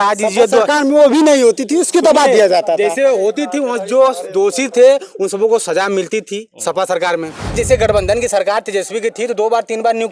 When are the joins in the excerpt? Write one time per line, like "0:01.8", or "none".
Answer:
0:07.6